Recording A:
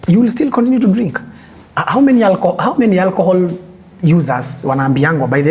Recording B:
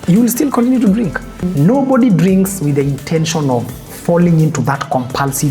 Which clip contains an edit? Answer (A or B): B